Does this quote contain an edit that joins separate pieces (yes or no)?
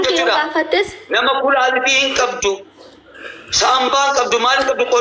no